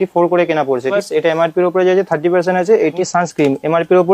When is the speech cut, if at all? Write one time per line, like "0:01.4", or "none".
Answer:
0:00.9
0:03.0